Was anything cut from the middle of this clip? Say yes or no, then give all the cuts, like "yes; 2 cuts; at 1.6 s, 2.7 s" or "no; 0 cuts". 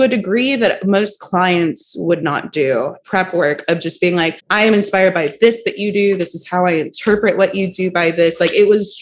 yes; 2 cuts; at 3.0 s, 4.4 s